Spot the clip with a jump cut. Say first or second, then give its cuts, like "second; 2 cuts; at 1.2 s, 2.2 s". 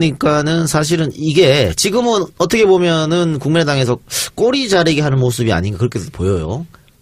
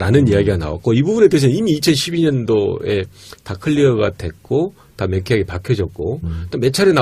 second; 1 cut; at 1.2 s